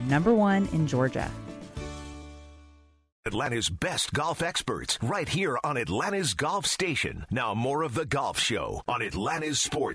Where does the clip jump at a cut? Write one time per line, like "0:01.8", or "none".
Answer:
0:03.5